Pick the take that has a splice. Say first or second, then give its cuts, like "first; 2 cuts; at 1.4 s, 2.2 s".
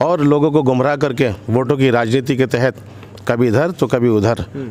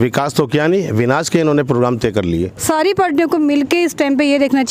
second; 1 cut; at 2.5 s